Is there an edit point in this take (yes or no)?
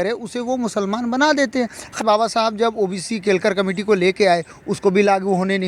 yes